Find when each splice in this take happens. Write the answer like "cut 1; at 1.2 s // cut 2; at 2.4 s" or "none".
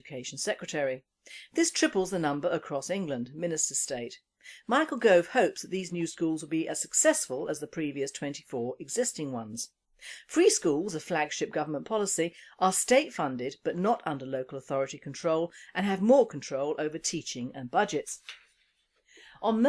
cut 1; at 1.3 s